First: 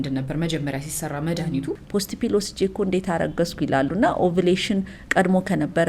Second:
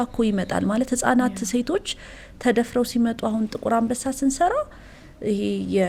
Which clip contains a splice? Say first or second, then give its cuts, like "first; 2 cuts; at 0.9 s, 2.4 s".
first; 1 cut; at 1.8 s